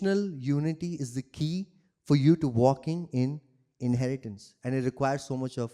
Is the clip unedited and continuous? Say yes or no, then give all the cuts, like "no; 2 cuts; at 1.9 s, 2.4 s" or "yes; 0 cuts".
yes; 0 cuts